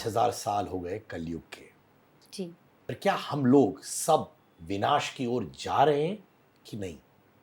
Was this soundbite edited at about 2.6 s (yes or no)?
yes